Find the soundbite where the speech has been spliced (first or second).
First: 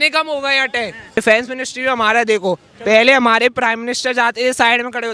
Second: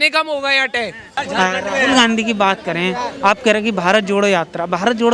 first